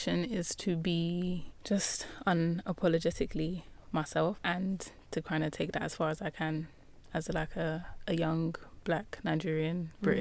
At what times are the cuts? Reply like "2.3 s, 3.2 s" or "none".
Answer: 1.5 s, 4.4 s, 7.9 s